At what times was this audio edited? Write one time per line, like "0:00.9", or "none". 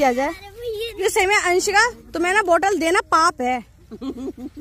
none